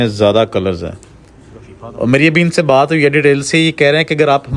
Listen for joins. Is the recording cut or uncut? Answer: uncut